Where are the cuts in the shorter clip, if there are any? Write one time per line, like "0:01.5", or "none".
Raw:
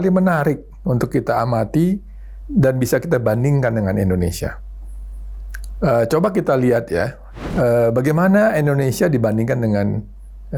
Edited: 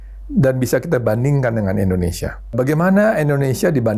0:02.6